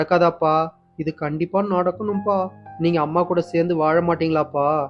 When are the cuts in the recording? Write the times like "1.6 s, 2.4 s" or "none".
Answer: none